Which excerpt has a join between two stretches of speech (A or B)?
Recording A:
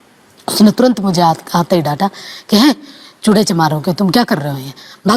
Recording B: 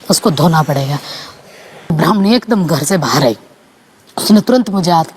B